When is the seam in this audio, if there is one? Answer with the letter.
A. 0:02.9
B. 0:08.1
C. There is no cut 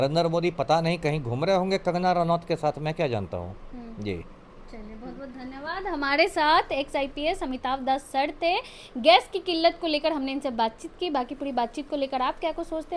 C